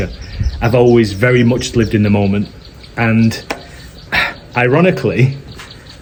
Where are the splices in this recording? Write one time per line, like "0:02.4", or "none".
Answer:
none